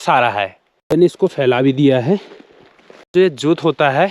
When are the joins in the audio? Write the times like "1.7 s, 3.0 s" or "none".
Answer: 1.0 s, 3.1 s